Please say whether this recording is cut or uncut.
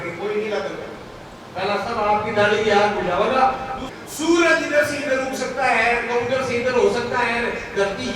cut